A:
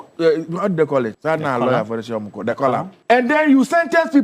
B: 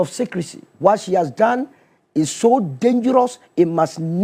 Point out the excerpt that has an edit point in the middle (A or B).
A